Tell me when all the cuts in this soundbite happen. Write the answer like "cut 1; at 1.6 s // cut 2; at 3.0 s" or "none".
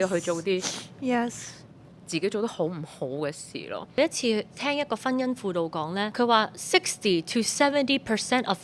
cut 1; at 4.0 s // cut 2; at 6.1 s

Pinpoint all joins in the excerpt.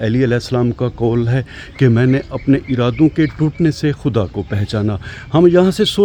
none

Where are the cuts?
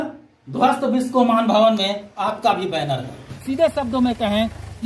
cut 1; at 3.3 s

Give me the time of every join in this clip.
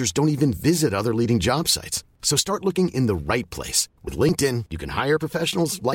none

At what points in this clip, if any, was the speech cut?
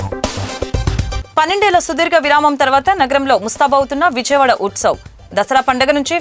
none

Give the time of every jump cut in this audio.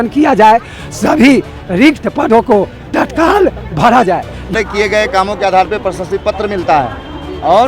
cut 1; at 4.5 s

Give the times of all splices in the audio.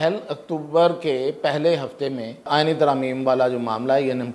cut 1; at 2.5 s

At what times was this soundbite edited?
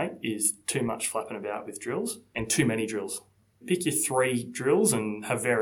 cut 1; at 2.3 s // cut 2; at 3.6 s

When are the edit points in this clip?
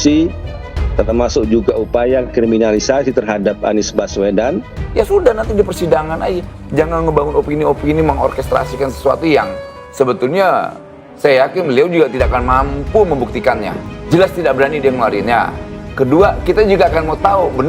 cut 1; at 4.8 s // cut 2; at 13.8 s

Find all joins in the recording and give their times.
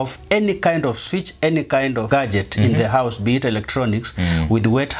cut 1; at 2.1 s

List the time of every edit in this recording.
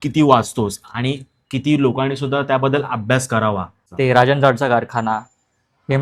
cut 1; at 3.8 s

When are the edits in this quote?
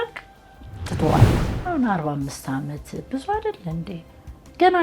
cut 1; at 1.3 s

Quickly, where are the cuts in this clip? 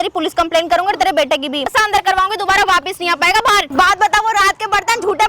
cut 1; at 1.7 s // cut 2; at 3.7 s

